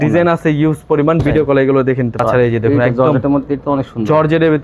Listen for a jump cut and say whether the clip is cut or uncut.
cut